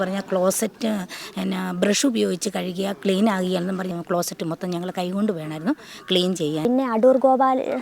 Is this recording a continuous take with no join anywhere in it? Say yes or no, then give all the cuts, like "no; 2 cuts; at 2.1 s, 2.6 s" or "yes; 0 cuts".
no; 2 cuts; at 3.9 s, 6.6 s